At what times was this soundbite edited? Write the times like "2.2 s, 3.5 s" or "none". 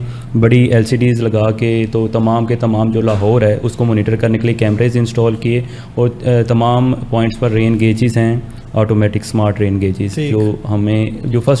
none